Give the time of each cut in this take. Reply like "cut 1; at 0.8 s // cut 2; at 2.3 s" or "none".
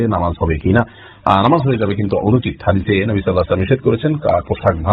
none